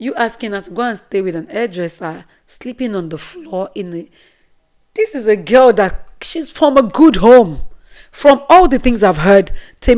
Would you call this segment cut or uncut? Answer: uncut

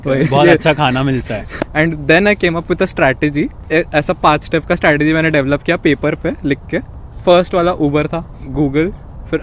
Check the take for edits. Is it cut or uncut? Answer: cut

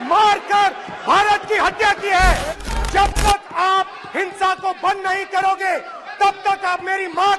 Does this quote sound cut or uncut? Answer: cut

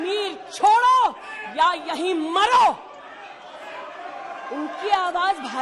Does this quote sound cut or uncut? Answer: uncut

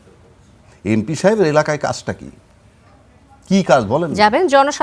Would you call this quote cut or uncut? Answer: uncut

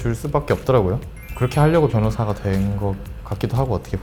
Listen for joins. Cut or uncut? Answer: uncut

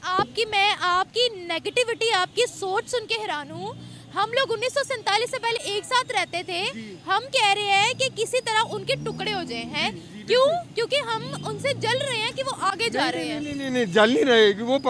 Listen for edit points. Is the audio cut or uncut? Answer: uncut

